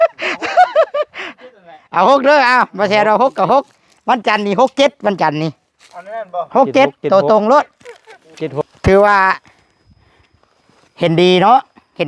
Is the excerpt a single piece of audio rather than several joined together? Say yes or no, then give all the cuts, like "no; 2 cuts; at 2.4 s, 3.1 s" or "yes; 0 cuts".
no; 1 cut; at 8.5 s